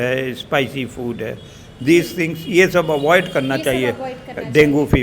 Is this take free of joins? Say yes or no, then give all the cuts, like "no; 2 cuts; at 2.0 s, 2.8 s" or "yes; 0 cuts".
yes; 0 cuts